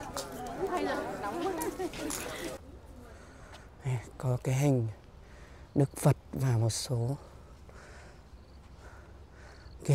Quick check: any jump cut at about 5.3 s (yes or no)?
no